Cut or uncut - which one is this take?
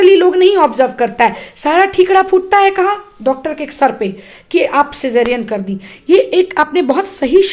uncut